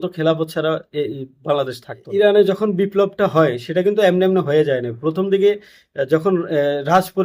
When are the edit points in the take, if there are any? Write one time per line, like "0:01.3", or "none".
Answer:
0:02.1

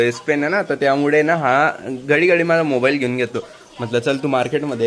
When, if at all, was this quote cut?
none

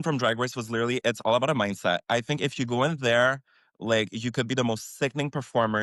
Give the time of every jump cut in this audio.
none

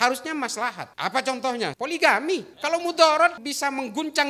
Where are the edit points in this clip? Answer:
0:00.9
0:01.7
0:02.5
0:03.5

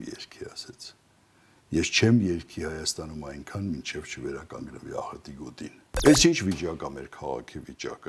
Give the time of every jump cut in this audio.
0:05.8

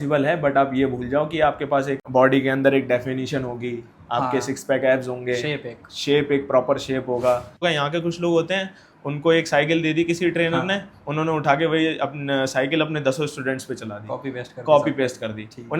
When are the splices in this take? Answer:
0:02.0
0:07.6

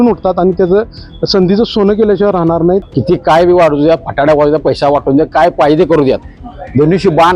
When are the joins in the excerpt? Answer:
0:02.9

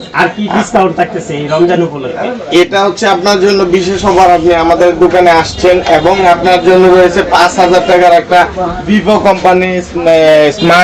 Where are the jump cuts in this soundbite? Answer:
none

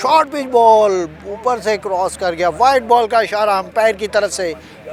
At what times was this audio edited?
none

